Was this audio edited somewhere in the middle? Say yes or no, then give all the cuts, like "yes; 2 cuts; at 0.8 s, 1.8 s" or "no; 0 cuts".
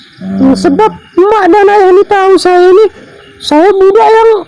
no; 0 cuts